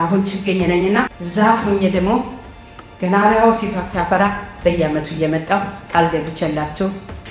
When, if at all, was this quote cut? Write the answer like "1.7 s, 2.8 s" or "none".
1.2 s